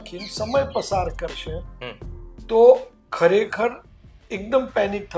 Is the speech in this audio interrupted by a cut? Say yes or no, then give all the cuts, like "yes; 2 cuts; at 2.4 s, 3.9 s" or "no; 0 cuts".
no; 0 cuts